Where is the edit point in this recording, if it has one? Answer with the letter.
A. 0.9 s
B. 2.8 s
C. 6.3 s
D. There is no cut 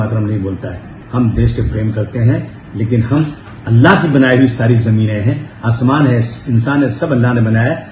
A